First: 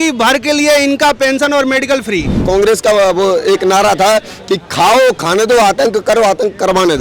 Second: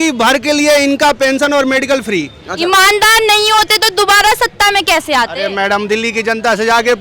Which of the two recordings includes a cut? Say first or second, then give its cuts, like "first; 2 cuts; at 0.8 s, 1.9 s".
first; 1 cut; at 2.4 s